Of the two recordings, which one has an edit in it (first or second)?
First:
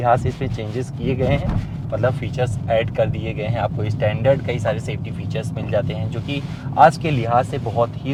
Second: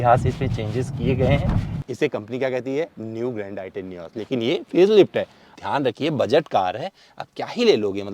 second